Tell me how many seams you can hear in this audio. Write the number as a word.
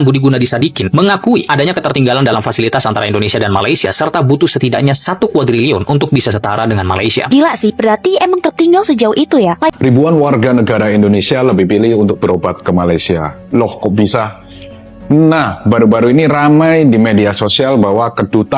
one